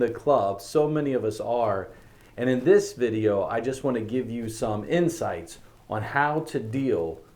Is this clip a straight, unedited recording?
yes; 0 cuts

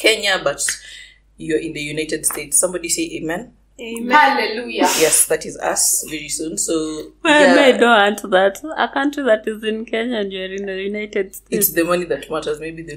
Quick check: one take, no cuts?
yes; 0 cuts

